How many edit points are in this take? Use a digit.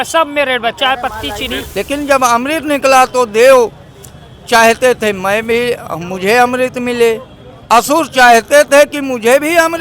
1